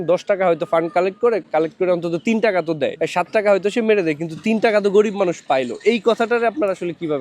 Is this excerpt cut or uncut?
cut